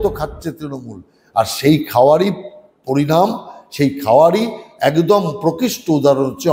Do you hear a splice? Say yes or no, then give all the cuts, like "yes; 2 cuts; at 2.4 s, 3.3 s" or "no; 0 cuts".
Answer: no; 0 cuts